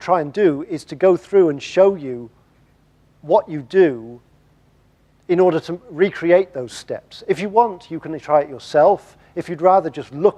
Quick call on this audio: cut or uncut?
uncut